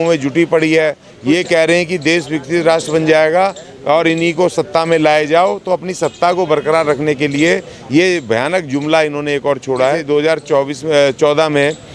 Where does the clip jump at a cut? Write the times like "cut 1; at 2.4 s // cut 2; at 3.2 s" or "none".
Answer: cut 1; at 1.1 s // cut 2; at 10.0 s

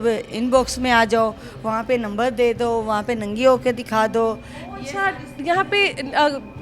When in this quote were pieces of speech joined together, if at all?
none

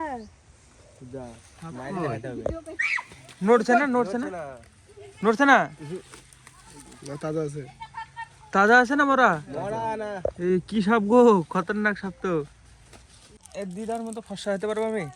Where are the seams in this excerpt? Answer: cut 1; at 13.4 s

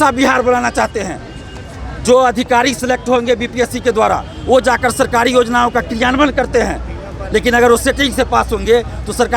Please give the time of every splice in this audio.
none

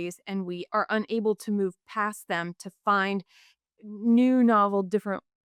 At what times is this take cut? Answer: none

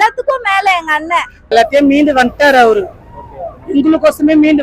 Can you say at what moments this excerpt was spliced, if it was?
cut 1; at 1.5 s

